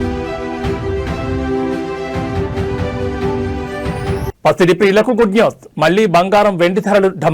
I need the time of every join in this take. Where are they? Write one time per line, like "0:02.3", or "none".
none